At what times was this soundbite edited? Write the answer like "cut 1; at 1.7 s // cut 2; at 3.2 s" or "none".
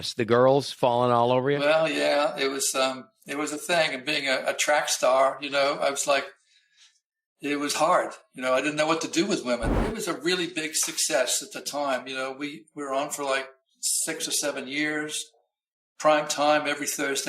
cut 1; at 9.8 s